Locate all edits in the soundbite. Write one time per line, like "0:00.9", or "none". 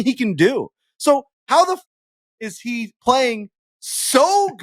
none